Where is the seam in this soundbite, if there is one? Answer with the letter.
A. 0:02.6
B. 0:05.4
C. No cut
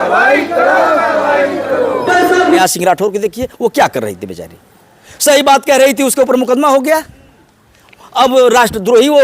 A